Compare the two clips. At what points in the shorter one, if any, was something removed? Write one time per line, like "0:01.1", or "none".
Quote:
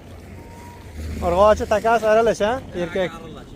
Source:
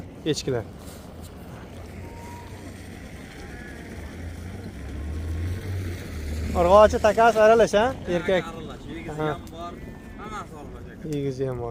0:00.9